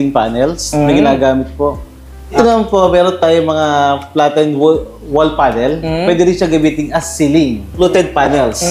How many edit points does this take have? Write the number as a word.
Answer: two